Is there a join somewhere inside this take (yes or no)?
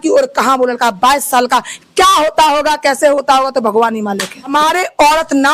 yes